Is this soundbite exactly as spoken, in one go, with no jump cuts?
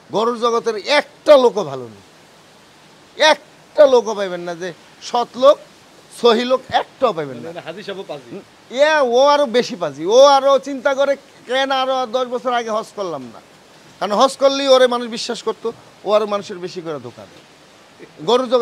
yes; 0 cuts

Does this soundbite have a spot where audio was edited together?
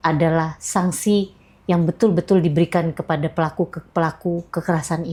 no; 0 cuts

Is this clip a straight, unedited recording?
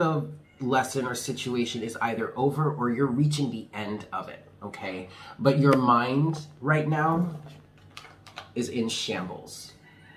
yes; 0 cuts

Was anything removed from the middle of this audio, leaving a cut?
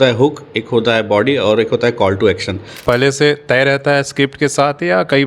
yes; 1 cut; at 2.8 s

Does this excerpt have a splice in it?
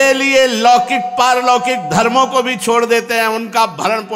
no; 0 cuts

